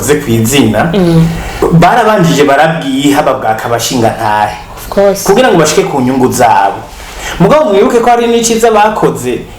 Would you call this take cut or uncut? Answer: cut